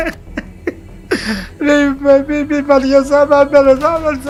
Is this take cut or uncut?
uncut